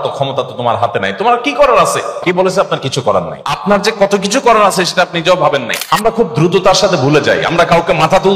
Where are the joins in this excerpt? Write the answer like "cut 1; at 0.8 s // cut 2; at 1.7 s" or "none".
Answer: cut 1; at 2.2 s // cut 2; at 3.6 s // cut 3; at 6.0 s